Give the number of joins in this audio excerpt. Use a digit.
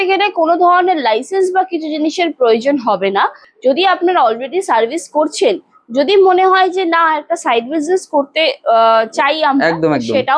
1